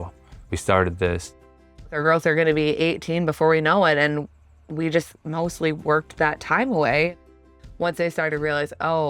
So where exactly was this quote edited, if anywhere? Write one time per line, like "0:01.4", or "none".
0:01.8
0:07.2